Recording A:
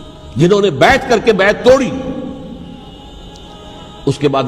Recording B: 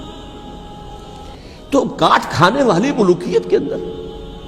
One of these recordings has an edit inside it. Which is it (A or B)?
A